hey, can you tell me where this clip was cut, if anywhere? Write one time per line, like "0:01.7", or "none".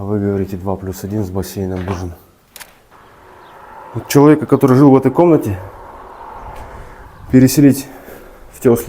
0:02.9